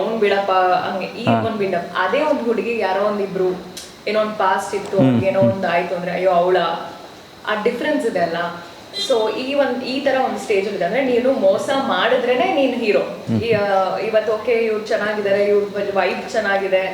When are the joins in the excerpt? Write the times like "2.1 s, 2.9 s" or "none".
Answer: 13.2 s